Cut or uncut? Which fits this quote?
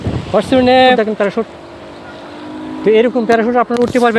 cut